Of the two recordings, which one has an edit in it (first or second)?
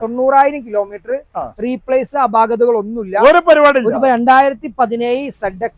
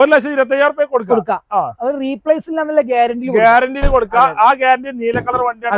first